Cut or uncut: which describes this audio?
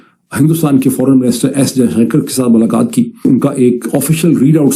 cut